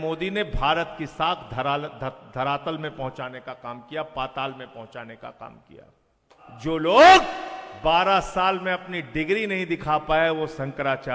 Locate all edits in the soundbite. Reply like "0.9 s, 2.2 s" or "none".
6.3 s